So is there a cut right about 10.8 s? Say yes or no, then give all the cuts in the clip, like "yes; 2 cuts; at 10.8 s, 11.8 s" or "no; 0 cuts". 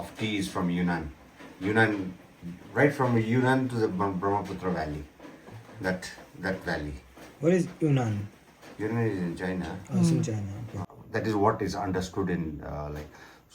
yes; 1 cut; at 10.8 s